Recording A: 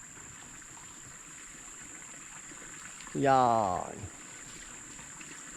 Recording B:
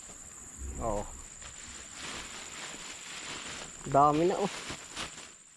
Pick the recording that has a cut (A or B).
A